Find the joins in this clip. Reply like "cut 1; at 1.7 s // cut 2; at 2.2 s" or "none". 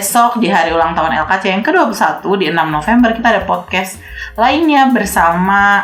none